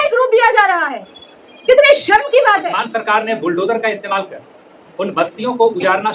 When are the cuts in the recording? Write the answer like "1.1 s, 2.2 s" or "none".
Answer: 2.8 s